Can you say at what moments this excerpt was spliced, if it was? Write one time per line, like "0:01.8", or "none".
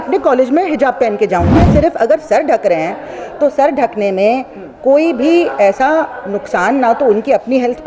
0:01.6